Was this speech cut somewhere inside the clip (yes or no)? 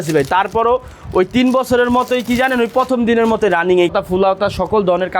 yes